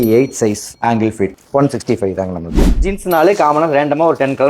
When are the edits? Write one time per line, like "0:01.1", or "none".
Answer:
0:02.5